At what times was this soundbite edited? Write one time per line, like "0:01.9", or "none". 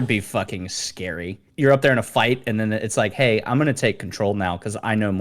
0:01.5